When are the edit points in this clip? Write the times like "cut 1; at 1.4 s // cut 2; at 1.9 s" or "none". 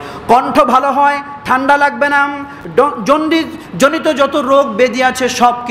none